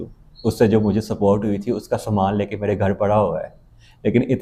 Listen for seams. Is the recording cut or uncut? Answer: uncut